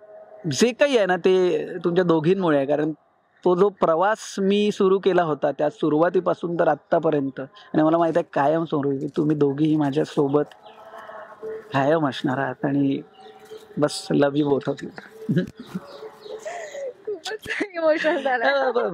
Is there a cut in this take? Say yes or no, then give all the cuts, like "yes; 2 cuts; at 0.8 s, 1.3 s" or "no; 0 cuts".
no; 0 cuts